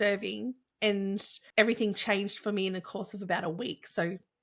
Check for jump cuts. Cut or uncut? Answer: cut